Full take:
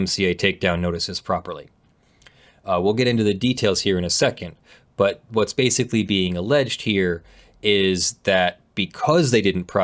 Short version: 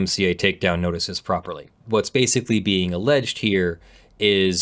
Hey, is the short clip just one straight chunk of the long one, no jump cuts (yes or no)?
no